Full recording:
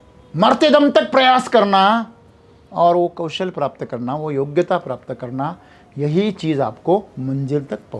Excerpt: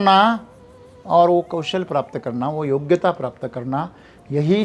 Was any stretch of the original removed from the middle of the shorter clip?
no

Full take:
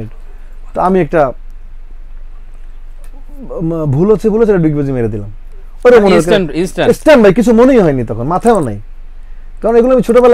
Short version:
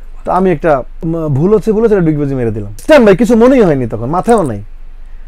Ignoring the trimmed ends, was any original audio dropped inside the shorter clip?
yes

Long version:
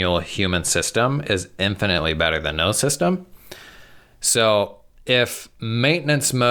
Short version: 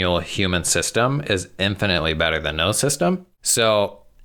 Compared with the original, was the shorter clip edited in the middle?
yes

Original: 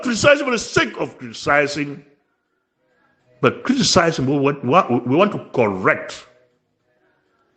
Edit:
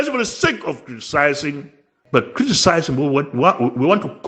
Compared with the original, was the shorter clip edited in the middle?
yes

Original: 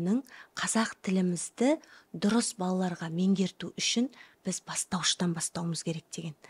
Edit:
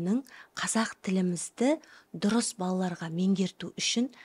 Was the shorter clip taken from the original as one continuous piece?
yes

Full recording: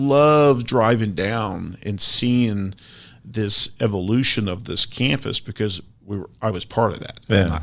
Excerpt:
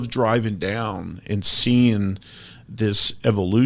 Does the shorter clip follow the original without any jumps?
yes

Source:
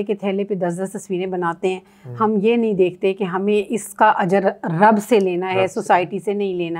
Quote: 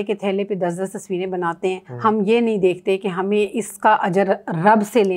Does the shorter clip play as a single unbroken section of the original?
no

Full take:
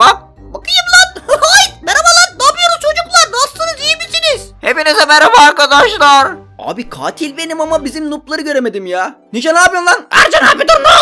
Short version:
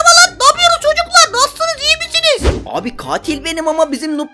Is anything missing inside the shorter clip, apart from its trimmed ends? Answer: yes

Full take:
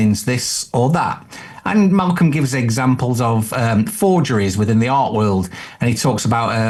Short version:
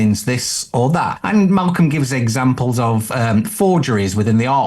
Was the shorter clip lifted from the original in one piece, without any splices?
no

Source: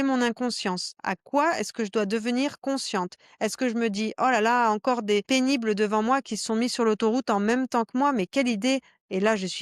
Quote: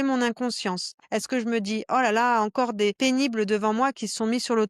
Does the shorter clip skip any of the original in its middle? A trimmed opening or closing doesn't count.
yes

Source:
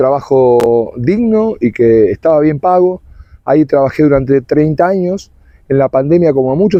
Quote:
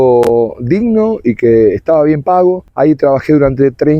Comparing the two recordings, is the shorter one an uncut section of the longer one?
no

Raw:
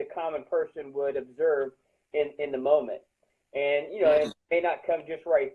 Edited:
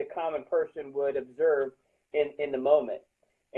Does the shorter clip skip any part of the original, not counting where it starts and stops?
no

